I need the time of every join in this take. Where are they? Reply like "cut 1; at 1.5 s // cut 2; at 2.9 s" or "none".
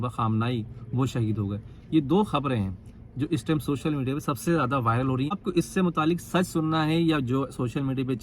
cut 1; at 5.4 s